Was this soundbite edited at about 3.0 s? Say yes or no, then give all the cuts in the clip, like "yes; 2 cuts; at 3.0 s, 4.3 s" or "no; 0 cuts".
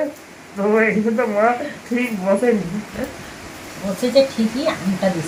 no; 0 cuts